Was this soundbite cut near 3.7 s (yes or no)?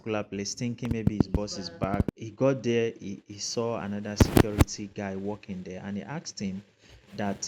no